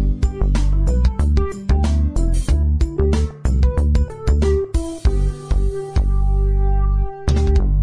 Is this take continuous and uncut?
yes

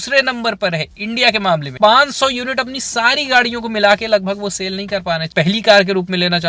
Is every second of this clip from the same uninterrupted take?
no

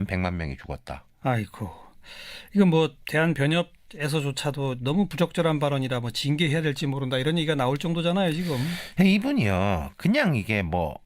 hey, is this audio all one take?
yes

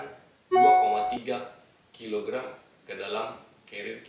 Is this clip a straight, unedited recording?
no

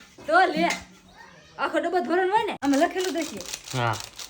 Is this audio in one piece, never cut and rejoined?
no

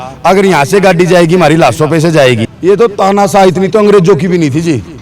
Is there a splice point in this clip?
yes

